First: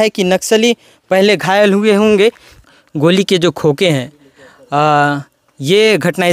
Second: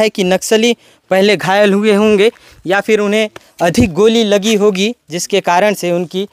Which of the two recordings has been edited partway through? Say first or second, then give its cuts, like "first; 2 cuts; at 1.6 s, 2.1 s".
first; 1 cut; at 2.5 s